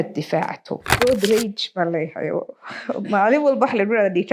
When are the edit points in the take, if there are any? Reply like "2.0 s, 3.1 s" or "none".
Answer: 1.0 s